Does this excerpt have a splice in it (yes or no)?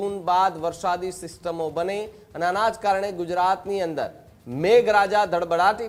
no